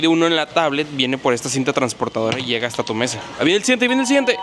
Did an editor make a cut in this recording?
no; 0 cuts

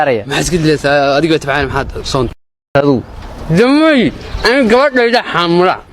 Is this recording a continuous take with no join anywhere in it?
no; 1 cut; at 2.5 s

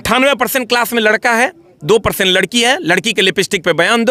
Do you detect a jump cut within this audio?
no; 0 cuts

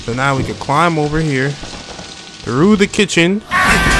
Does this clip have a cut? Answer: no; 0 cuts

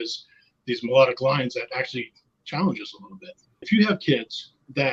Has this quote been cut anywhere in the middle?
yes; 1 cut; at 3.6 s

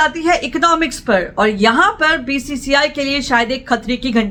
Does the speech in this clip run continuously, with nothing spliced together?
yes; 0 cuts

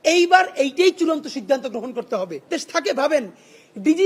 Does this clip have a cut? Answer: yes; 1 cut; at 2.5 s

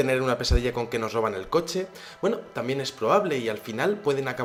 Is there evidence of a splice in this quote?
no; 0 cuts

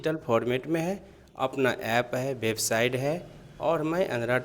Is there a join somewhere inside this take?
no; 0 cuts

